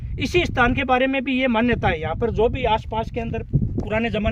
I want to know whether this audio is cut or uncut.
uncut